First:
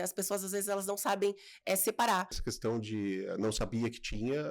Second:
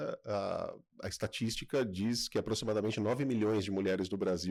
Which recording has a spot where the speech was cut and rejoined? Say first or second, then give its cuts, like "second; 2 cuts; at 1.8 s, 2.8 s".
first; 1 cut; at 2.4 s